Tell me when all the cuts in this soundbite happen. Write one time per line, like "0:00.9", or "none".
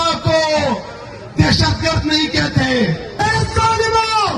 0:03.1